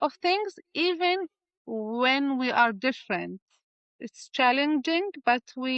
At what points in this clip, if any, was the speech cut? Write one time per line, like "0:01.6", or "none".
0:03.5